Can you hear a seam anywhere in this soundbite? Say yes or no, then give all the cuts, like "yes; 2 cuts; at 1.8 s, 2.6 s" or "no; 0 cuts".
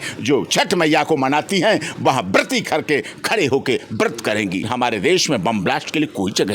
yes; 1 cut; at 4.6 s